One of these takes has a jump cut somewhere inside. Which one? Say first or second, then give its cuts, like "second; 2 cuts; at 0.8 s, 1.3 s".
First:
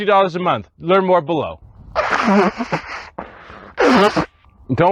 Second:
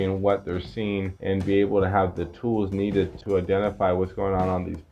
second; 1 cut; at 3.2 s